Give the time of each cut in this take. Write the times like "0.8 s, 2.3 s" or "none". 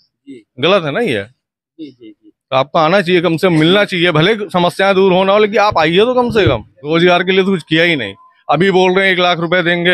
6.7 s